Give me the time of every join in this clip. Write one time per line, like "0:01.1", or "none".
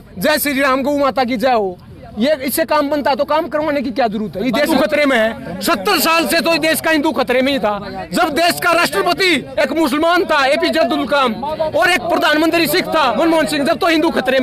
0:04.7